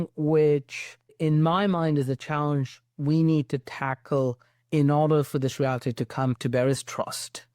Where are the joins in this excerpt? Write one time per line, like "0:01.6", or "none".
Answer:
0:01.2
0:06.4